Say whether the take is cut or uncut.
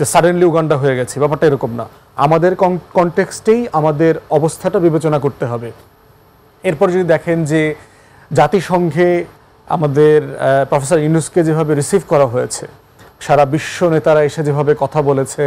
uncut